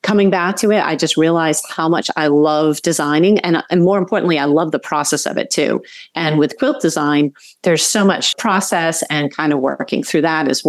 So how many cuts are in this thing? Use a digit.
1